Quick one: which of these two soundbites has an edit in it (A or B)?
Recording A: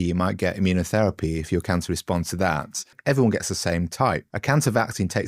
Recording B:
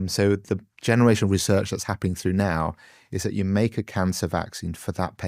A